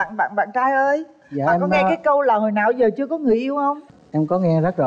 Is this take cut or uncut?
uncut